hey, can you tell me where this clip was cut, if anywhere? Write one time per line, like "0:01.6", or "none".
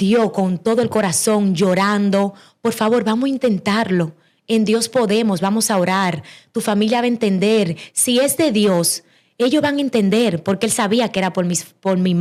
none

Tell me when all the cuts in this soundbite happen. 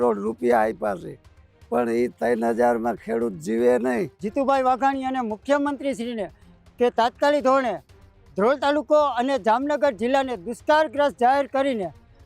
0:04.2

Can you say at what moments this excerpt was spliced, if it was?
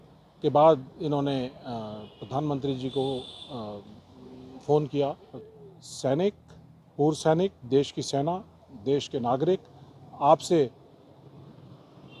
0:05.4

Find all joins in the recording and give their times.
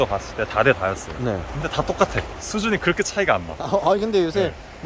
0:01.5
0:02.4

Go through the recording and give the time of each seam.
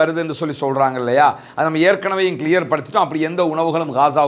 none

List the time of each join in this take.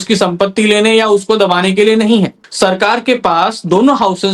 0:02.4

